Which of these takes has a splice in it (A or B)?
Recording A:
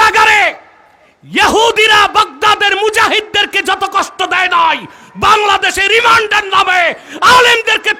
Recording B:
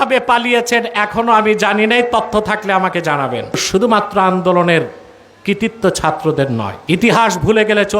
B